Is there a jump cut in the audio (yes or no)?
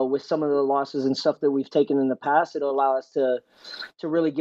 no